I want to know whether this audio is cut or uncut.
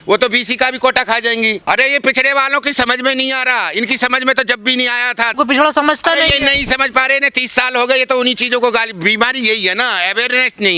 cut